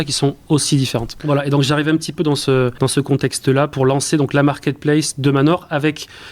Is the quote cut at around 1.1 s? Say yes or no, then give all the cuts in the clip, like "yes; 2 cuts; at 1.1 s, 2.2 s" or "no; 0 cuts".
yes; 2 cuts; at 1.1 s, 3.4 s